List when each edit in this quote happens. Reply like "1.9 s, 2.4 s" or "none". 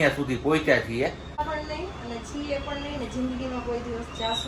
1.4 s